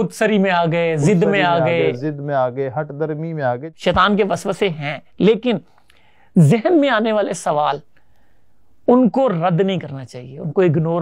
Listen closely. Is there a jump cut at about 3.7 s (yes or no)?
yes